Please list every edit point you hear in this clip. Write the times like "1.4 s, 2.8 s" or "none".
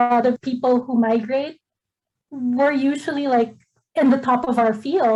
none